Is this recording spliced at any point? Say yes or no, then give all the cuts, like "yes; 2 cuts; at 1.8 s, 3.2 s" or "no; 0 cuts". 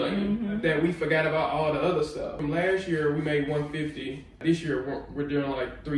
yes; 2 cuts; at 2.3 s, 4.4 s